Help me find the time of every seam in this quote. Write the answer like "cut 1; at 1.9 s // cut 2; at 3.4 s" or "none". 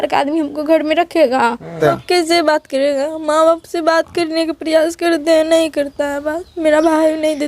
cut 1; at 1.8 s